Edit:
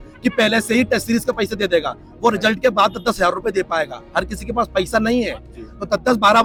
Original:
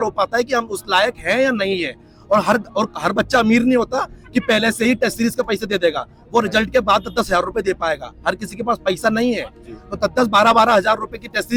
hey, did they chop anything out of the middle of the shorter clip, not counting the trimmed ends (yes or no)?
no